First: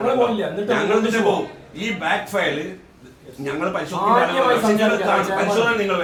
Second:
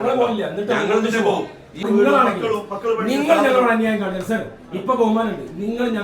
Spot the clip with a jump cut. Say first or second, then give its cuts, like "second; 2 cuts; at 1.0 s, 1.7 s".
second; 1 cut; at 1.8 s